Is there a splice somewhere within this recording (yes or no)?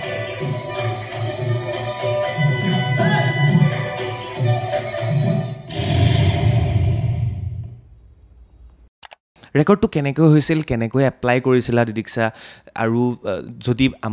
yes